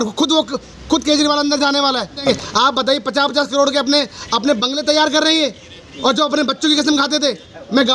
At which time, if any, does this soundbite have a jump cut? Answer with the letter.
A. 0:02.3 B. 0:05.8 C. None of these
A